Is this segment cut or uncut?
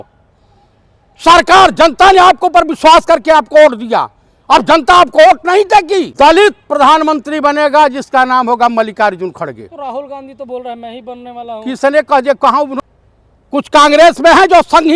cut